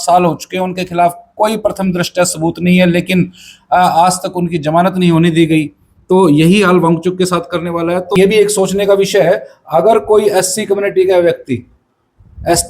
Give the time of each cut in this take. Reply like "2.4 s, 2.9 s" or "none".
8.2 s